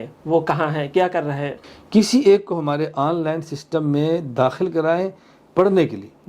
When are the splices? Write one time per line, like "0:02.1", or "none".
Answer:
0:01.6